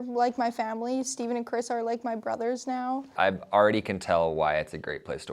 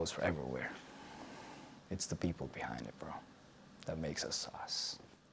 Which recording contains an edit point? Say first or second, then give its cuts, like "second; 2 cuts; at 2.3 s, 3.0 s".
first; 1 cut; at 3.1 s